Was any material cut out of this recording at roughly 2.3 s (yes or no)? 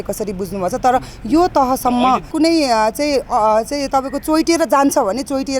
yes